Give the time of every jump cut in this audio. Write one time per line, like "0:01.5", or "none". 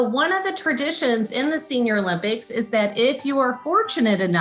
none